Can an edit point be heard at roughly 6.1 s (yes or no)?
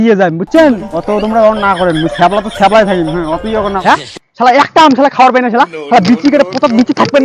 no